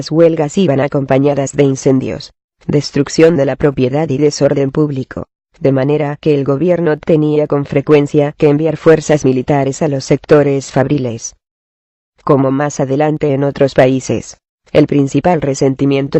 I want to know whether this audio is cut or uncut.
cut